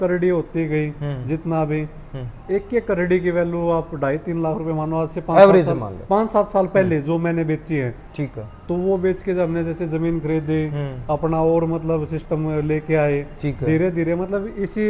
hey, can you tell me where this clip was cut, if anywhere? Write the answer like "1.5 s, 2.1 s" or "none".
none